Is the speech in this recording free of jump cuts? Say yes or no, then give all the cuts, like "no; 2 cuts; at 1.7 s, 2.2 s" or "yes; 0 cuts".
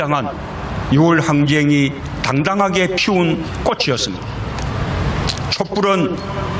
yes; 0 cuts